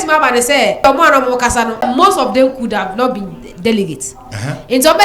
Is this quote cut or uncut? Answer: cut